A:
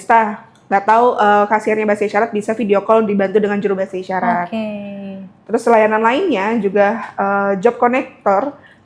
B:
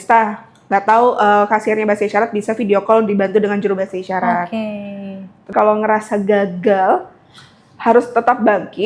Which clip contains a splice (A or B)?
B